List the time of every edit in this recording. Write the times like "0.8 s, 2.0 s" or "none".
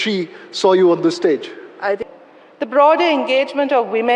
2.0 s